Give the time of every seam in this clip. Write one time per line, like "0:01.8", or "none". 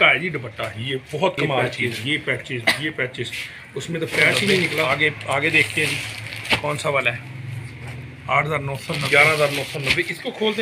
0:01.6
0:04.9
0:09.0